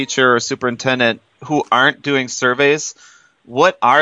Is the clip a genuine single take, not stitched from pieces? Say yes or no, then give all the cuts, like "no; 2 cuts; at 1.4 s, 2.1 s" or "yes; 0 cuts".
yes; 0 cuts